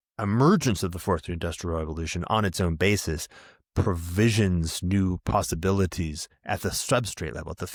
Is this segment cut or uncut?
uncut